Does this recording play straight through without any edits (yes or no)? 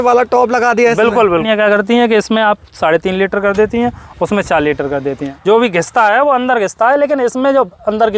no